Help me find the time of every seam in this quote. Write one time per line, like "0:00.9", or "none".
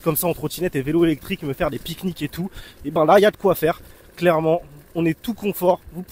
none